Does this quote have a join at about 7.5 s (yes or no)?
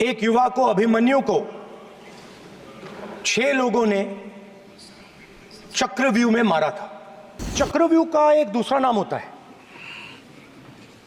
yes